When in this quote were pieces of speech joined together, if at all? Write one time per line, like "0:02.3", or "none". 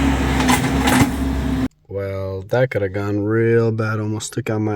0:01.7

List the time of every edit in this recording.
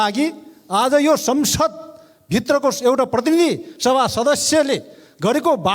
none

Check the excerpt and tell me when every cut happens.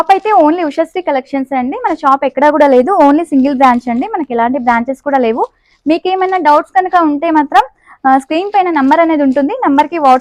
none

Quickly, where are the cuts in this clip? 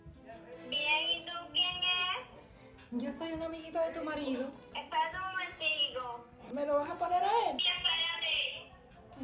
0:04.6
0:06.4
0:07.6

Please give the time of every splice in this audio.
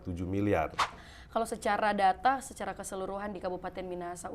0:01.0

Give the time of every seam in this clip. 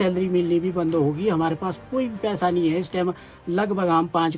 none

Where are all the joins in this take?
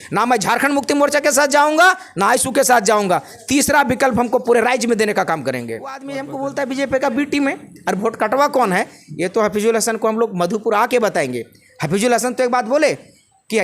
0:06.2

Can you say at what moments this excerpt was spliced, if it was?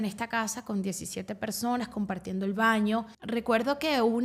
0:03.2

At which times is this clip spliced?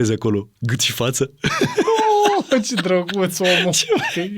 none

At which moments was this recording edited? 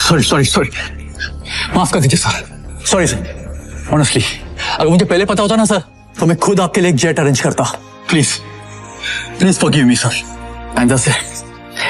none

